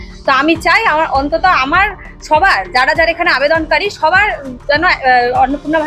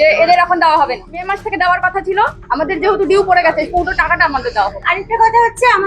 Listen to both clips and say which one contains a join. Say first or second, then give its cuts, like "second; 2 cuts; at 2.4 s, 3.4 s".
second; 1 cut; at 1.3 s